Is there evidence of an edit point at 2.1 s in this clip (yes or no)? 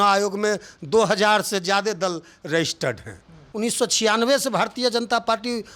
no